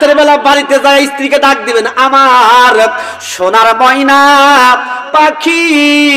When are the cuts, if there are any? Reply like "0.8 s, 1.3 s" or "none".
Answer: none